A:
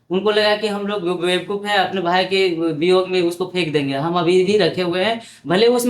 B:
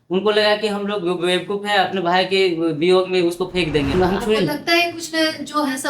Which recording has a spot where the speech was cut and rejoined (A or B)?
B